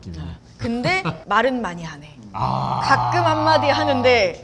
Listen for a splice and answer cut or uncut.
cut